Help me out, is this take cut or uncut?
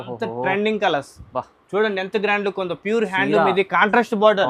uncut